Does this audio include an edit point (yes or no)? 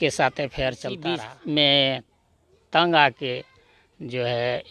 yes